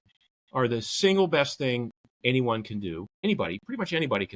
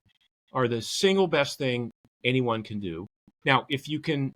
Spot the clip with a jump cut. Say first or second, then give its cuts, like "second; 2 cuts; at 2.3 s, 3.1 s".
first; 1 cut; at 3.2 s